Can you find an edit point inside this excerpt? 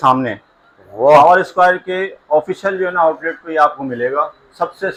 no; 0 cuts

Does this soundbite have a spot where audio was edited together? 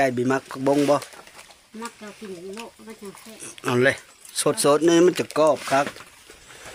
no; 0 cuts

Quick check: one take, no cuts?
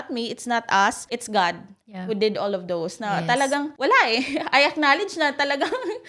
yes; 0 cuts

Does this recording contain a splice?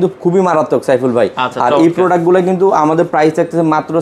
no; 0 cuts

